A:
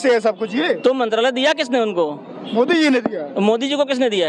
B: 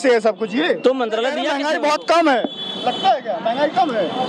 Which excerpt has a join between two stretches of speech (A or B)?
B